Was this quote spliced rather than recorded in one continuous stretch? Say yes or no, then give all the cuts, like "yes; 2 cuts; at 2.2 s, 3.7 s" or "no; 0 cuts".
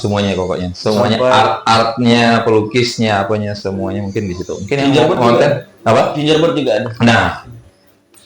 no; 0 cuts